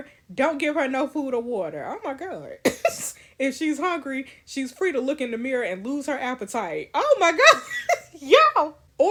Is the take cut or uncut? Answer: uncut